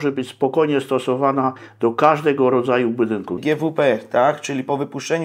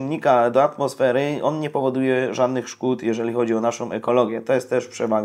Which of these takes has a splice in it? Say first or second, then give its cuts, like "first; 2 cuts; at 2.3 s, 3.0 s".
first; 1 cut; at 3.3 s